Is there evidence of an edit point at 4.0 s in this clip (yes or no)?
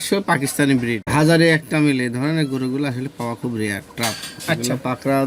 no